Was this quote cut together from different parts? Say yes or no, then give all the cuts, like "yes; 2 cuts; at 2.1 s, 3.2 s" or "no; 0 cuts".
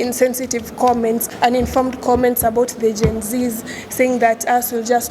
yes; 1 cut; at 1.2 s